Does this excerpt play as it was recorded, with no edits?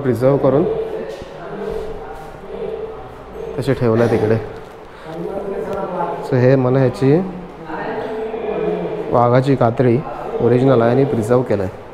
yes; 0 cuts

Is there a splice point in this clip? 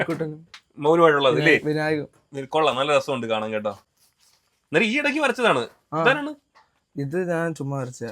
no; 0 cuts

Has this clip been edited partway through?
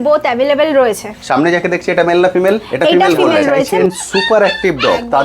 yes; 1 cut; at 3.7 s

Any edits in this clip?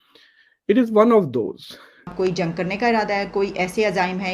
yes; 1 cut; at 2.1 s

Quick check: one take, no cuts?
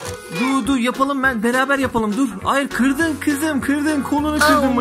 yes; 0 cuts

